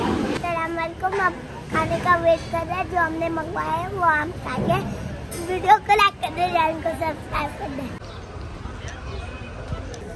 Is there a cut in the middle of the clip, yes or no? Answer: yes